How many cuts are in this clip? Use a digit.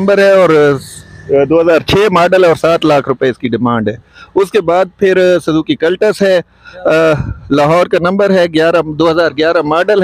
0